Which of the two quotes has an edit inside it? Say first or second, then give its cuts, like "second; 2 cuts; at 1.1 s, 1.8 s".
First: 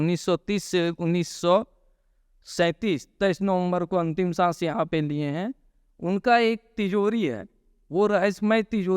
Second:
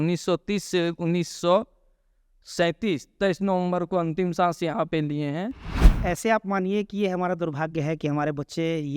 second; 1 cut; at 5.9 s